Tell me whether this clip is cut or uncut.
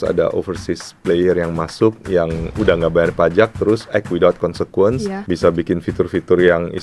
cut